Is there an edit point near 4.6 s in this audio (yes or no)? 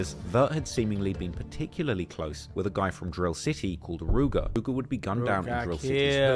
yes